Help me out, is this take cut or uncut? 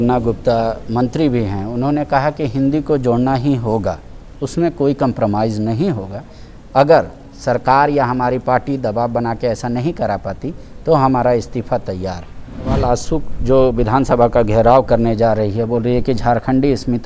cut